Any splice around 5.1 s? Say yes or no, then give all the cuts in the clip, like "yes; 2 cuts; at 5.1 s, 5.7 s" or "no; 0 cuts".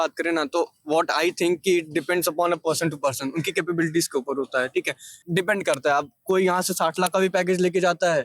yes; 1 cut; at 5.1 s